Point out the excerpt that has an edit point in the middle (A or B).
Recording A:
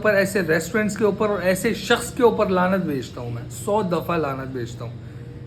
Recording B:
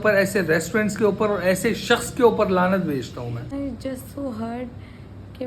B